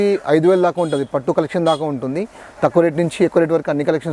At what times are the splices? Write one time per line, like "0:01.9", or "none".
none